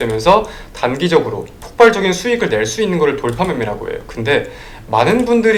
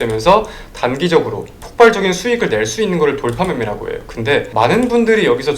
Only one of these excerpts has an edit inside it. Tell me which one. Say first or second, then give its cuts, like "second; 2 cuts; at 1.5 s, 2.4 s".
second; 1 cut; at 4.5 s